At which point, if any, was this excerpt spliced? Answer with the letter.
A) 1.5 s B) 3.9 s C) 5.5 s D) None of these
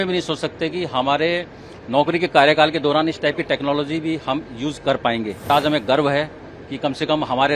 C